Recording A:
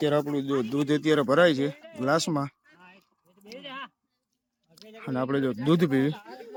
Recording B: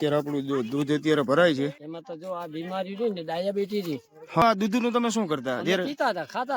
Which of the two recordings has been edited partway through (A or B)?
B